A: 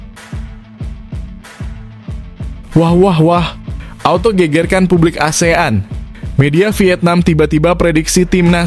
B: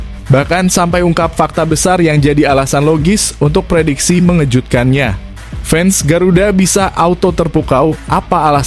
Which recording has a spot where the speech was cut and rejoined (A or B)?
A